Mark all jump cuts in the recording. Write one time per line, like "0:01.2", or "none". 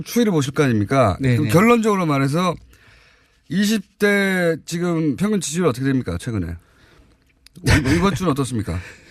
0:06.5